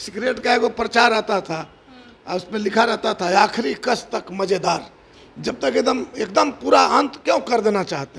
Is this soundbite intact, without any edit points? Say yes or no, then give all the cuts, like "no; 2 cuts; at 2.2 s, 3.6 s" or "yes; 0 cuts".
yes; 0 cuts